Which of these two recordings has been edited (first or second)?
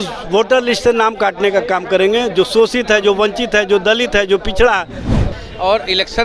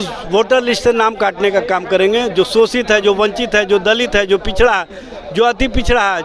first